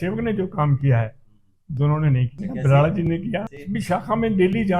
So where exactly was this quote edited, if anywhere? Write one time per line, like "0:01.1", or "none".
0:02.3
0:03.6

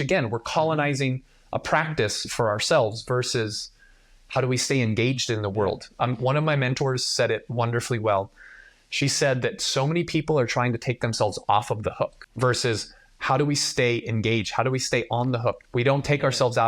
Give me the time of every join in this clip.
0:12.2

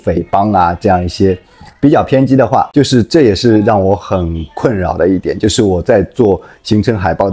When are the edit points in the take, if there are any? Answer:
0:02.7

